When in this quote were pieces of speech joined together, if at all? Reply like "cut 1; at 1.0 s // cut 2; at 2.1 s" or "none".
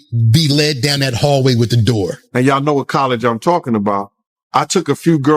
cut 1; at 2.2 s